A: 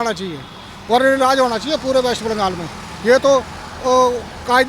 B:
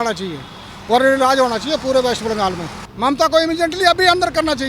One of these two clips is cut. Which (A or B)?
B